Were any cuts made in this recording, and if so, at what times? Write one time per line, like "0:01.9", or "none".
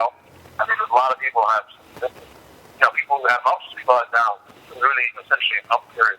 none